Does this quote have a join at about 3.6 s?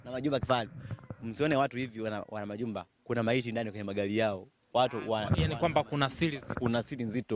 no; 1 cut; at 1.7 s

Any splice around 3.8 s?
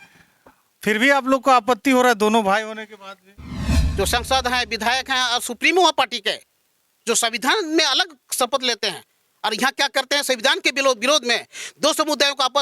yes; 1 cut; at 3.8 s

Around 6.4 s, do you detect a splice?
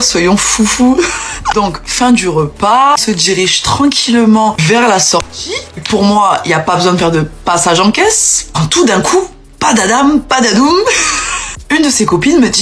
no; 1 cut; at 1.3 s

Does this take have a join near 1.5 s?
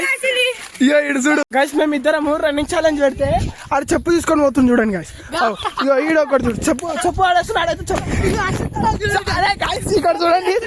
yes; 2 cuts; at 1.5 s, 8.0 s

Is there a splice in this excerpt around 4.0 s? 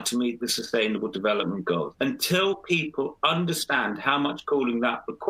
no; 1 cut; at 1.9 s

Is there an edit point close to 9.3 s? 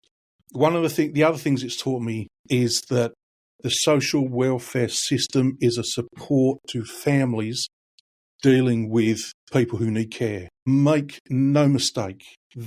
yes; 2 cuts; at 9.3 s, 10.5 s

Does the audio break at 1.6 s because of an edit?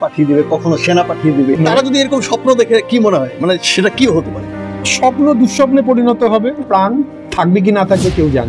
yes; 2 cuts; at 1.6 s, 6.6 s

